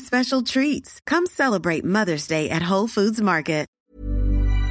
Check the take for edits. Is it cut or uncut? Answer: cut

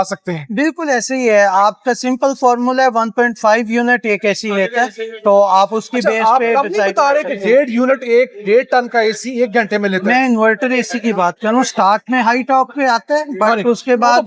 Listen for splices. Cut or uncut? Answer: uncut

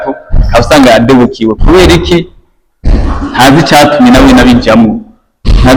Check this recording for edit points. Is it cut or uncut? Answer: uncut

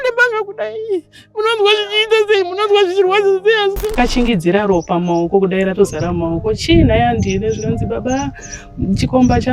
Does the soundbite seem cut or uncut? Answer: cut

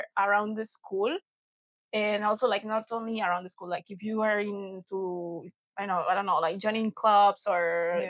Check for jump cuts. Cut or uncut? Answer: uncut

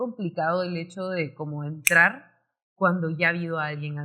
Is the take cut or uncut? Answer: uncut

